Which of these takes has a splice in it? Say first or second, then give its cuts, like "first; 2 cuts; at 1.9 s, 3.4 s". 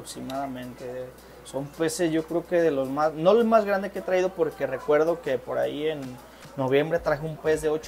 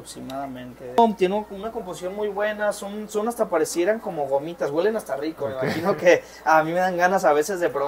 second; 1 cut; at 1.0 s